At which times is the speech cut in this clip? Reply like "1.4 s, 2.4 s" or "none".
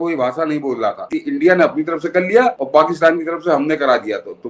1.0 s, 2.6 s